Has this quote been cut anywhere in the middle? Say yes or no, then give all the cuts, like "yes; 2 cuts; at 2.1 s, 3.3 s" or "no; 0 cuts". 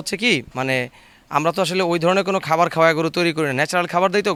no; 0 cuts